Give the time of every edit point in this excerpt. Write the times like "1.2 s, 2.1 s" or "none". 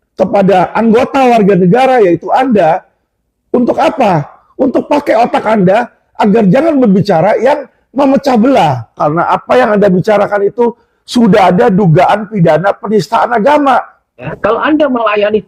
14.3 s